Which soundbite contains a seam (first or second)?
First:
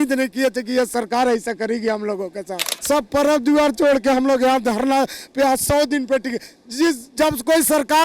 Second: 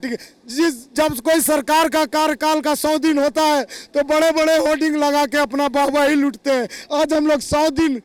first